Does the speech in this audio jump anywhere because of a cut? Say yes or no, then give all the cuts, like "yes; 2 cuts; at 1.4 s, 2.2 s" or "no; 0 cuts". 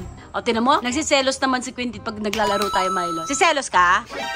yes; 1 cut; at 3.2 s